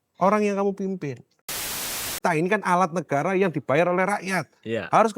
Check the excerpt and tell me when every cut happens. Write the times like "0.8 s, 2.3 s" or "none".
1.8 s